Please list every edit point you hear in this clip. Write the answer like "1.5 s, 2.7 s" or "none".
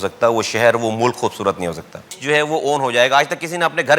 2.1 s